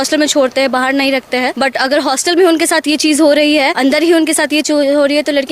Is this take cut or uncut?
cut